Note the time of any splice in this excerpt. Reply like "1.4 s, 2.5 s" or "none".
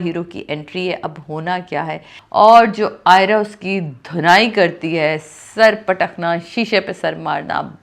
2.1 s